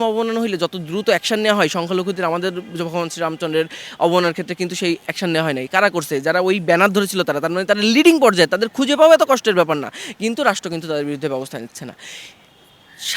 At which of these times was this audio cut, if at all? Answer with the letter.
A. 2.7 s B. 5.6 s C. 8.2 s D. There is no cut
D